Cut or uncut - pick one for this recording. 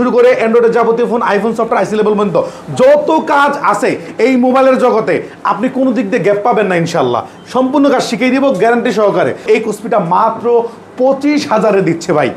cut